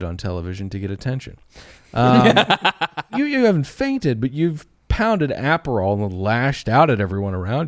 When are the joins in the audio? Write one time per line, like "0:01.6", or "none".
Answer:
0:03.1